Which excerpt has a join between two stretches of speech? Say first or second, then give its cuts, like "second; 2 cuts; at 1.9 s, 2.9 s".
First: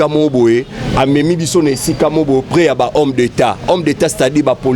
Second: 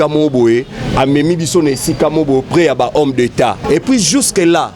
second; 1 cut; at 3.6 s